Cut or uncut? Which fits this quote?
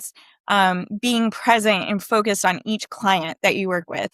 uncut